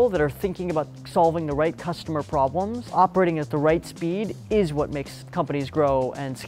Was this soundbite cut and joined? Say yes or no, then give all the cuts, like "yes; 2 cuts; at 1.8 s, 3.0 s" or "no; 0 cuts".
no; 0 cuts